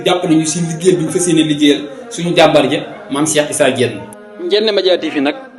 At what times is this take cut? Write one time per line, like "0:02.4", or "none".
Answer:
none